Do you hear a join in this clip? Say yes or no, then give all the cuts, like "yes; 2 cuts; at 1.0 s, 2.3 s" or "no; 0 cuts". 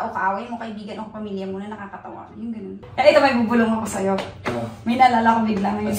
yes; 1 cut; at 2.8 s